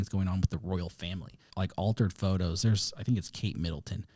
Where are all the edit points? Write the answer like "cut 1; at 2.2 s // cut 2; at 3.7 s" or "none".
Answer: cut 1; at 1.5 s